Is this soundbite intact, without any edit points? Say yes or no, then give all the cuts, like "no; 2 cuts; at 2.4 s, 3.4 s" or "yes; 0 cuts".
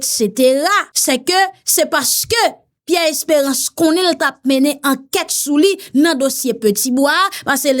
no; 1 cut; at 0.9 s